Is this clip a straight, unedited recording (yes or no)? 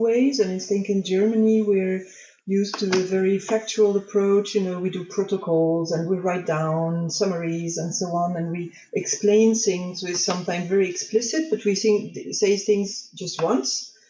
yes